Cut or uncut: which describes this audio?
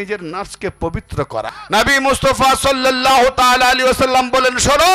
cut